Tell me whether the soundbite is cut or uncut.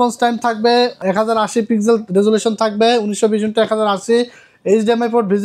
cut